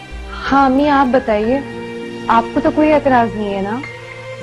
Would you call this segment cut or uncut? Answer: uncut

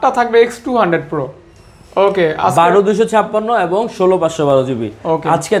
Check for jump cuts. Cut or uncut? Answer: uncut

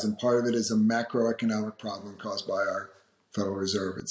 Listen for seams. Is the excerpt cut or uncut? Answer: uncut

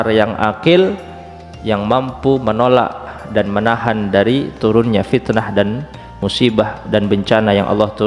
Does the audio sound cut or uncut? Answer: uncut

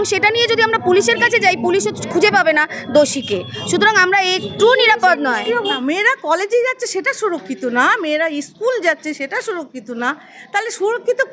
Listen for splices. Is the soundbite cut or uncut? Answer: cut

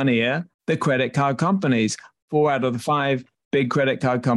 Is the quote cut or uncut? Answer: cut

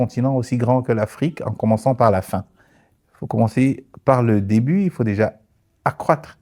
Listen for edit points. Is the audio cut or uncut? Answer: uncut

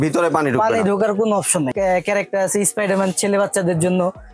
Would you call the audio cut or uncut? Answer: cut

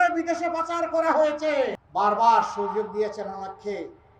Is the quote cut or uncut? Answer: cut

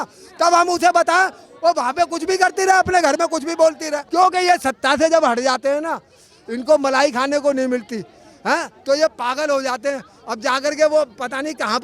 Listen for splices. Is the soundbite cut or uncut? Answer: cut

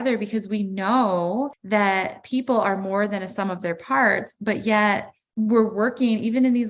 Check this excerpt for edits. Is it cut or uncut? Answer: cut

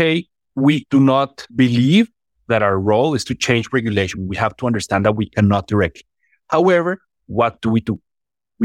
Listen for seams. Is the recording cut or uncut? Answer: cut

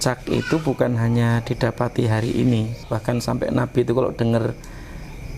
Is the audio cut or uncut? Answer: cut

